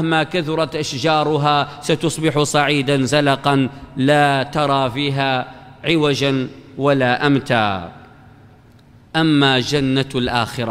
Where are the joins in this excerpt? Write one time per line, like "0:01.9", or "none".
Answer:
none